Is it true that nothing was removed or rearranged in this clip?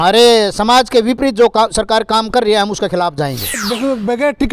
no; 1 cut; at 3.6 s

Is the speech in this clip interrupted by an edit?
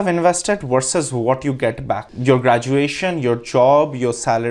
yes; 1 cut; at 2.1 s

